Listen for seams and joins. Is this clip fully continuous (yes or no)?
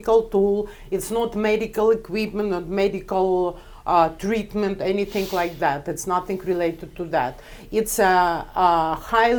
yes